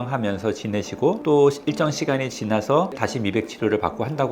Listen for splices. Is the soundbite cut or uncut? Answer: cut